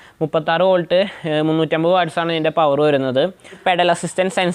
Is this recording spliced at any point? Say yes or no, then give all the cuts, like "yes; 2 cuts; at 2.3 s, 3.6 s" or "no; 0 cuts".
yes; 1 cut; at 3.6 s